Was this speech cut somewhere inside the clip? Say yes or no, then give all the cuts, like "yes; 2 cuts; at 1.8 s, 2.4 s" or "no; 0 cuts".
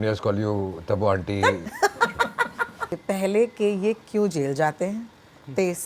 yes; 1 cut; at 2.9 s